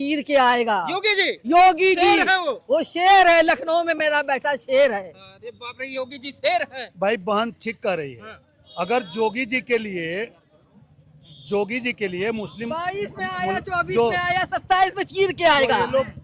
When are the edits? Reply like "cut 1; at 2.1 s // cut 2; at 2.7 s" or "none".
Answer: none

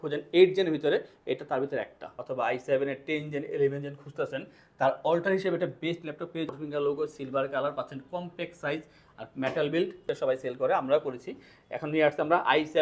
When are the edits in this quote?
cut 1; at 2.2 s // cut 2; at 6.6 s // cut 3; at 10.0 s

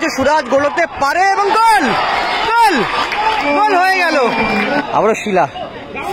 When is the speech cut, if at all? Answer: cut 1; at 4.8 s

